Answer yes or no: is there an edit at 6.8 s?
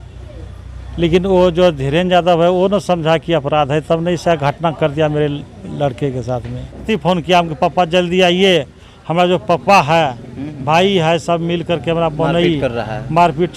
yes